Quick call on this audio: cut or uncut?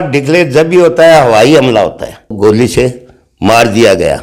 cut